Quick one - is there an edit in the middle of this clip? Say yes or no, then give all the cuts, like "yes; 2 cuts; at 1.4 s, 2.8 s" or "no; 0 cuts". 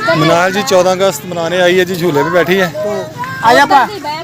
no; 0 cuts